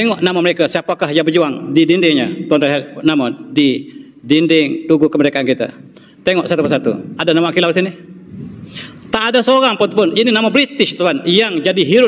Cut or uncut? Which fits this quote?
uncut